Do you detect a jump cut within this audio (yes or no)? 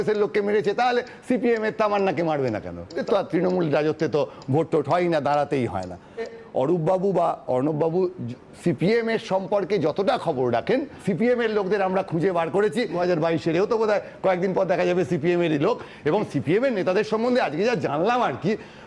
yes